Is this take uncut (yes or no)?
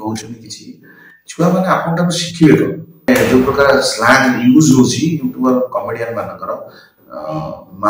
no